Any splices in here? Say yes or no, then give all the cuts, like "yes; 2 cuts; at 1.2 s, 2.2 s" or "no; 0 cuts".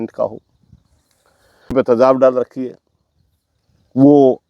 yes; 1 cut; at 1.7 s